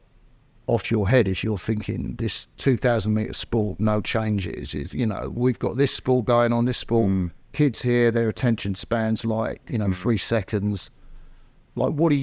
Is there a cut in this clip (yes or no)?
no